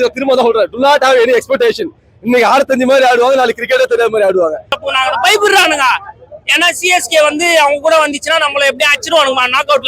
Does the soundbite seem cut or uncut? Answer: cut